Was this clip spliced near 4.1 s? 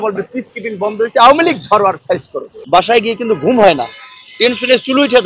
no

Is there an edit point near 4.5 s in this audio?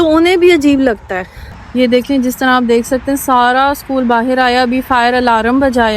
no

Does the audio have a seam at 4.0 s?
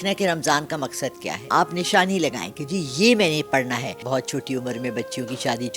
yes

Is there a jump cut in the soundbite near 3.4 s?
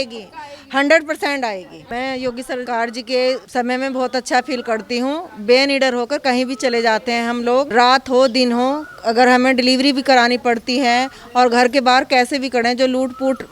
yes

